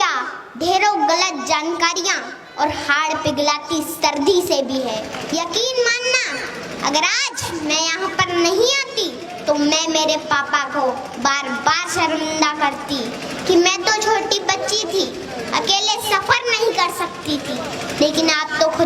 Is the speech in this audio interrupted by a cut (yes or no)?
yes